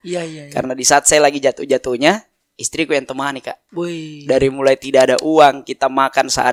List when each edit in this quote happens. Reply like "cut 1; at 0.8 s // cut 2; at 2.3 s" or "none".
none